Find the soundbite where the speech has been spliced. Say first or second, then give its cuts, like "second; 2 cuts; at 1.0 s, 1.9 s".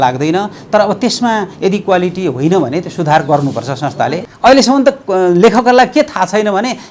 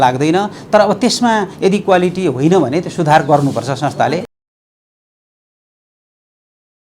first; 1 cut; at 4.2 s